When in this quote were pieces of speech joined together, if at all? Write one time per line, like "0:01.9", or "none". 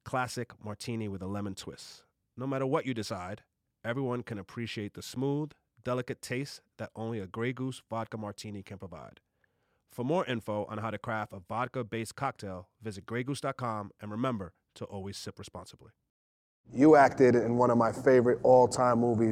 0:16.7